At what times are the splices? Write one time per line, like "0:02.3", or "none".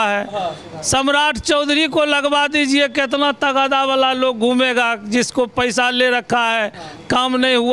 none